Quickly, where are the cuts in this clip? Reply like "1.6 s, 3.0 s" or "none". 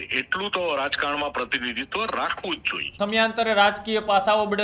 2.9 s